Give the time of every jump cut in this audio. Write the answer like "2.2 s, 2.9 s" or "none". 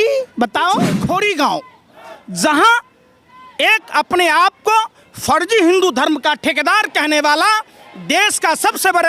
1.0 s